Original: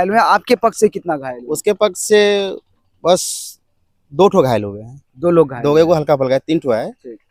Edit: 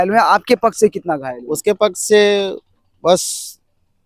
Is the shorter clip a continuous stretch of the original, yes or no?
yes